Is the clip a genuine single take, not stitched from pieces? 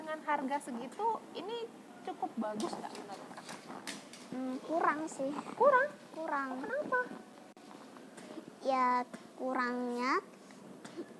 yes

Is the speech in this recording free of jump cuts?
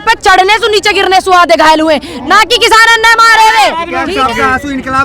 no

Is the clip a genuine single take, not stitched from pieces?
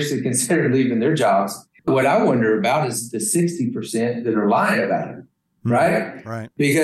no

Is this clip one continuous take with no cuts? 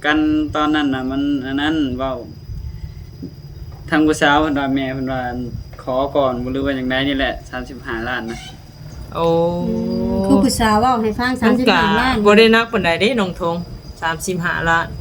yes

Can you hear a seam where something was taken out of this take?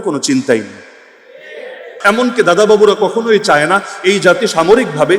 yes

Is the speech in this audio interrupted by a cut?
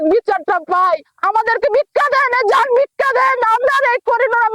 yes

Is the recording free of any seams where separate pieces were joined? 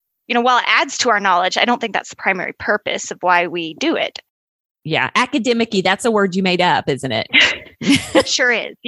yes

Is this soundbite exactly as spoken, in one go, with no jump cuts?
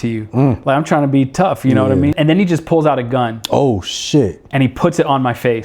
no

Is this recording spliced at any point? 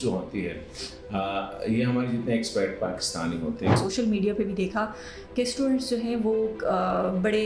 yes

